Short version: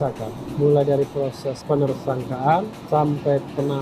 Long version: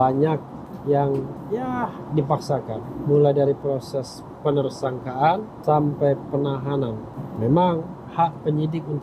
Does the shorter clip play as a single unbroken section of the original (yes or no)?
no